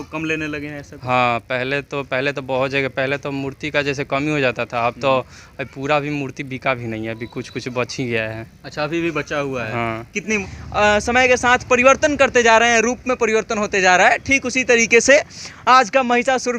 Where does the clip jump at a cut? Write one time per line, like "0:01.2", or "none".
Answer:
0:10.5